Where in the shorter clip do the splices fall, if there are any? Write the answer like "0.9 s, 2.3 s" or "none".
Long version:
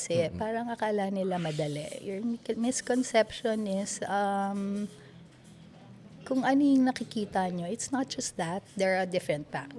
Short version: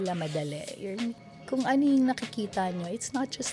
1.2 s